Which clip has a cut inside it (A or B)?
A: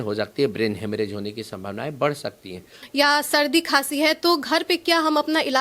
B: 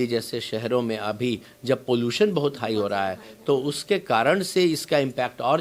A